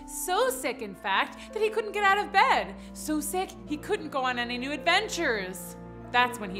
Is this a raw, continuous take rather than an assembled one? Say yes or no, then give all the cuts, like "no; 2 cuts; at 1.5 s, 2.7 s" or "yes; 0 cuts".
yes; 0 cuts